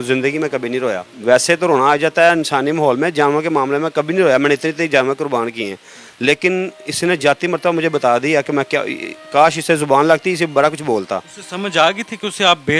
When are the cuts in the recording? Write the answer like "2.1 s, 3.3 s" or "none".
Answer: none